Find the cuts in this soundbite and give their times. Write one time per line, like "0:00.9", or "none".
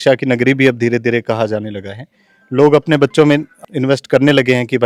none